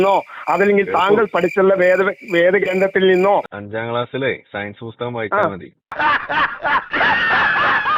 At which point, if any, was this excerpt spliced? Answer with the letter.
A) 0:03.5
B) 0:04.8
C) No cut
A